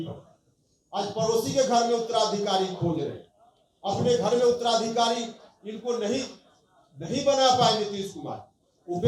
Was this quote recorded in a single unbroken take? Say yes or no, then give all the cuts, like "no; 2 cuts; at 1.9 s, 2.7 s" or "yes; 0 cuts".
yes; 0 cuts